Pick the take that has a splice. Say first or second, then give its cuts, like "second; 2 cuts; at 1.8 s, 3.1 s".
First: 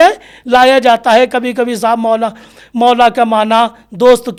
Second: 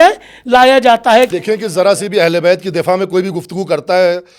second; 1 cut; at 1.4 s